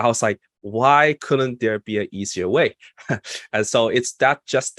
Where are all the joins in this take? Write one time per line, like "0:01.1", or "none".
none